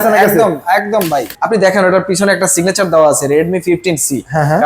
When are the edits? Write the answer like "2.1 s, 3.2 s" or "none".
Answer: 1.3 s